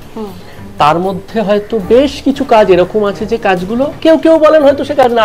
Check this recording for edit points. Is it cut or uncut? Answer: cut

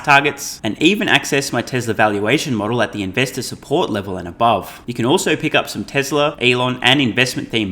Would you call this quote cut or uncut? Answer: cut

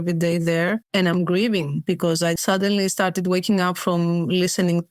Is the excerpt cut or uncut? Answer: cut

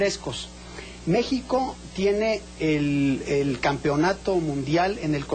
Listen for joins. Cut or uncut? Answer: cut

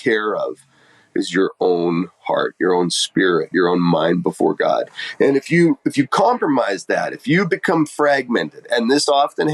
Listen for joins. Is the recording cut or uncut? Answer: uncut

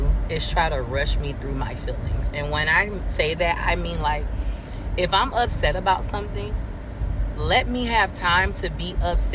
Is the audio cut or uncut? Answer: uncut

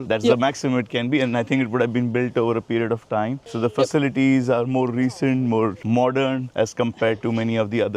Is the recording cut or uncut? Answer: uncut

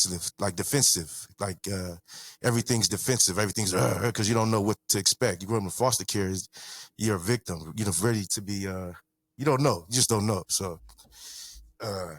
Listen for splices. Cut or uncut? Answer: uncut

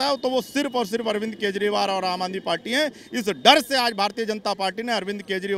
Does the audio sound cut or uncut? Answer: uncut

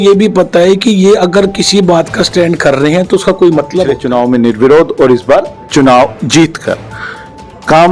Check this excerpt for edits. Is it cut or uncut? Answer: cut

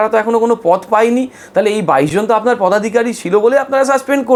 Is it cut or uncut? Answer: uncut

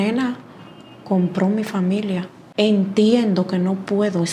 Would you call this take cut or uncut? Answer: cut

